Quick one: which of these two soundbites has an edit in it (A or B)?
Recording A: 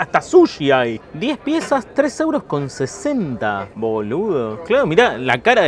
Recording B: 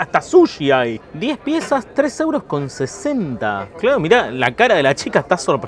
B